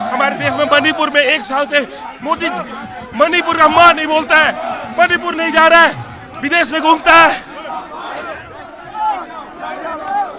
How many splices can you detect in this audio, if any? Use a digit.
1